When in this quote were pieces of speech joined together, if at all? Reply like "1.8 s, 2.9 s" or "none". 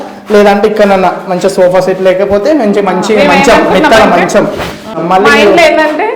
5.0 s